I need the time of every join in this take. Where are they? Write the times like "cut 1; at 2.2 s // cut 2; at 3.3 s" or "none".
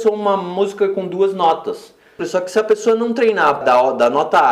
cut 1; at 2.2 s // cut 2; at 3.6 s